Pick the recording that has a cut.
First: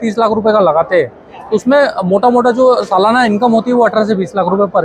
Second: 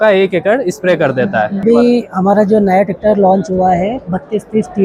second; 1 cut; at 1.6 s

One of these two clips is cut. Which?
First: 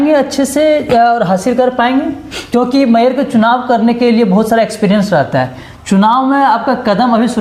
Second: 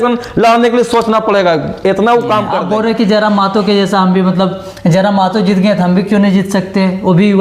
second; 1 cut; at 2.6 s

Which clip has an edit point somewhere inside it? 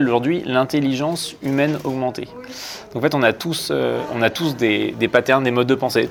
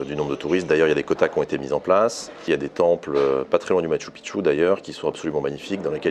second; 1 cut; at 2.5 s

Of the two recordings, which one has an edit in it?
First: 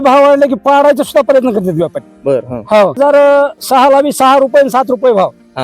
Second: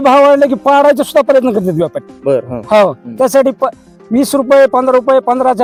first; 1 cut; at 3.0 s

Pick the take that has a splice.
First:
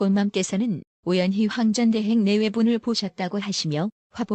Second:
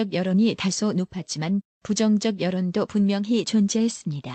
first; 1 cut; at 0.9 s

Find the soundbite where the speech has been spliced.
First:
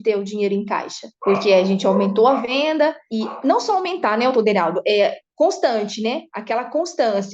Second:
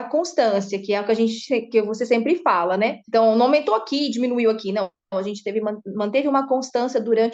first; 2 cuts; at 1.1 s, 2.5 s

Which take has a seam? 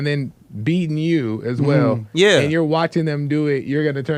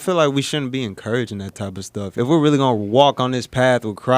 second; 1 cut; at 2.2 s

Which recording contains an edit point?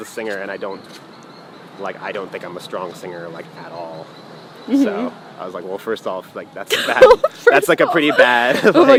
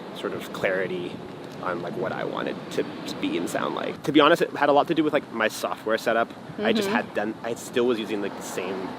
second; 1 cut; at 3.9 s

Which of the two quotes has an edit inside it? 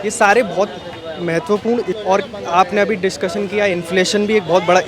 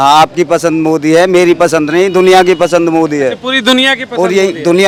first; 1 cut; at 2.0 s

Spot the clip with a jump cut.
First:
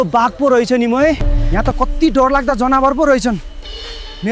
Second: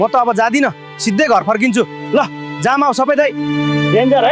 first; 1 cut; at 1.3 s

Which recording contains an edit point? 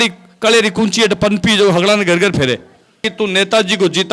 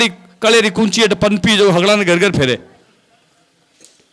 first; 1 cut; at 3.1 s

